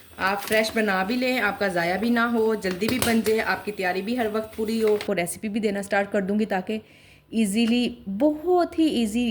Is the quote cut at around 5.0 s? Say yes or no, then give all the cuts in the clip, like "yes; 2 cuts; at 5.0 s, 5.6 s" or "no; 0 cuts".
yes; 1 cut; at 5.0 s